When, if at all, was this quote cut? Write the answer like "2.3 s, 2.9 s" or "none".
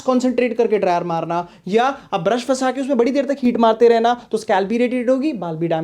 none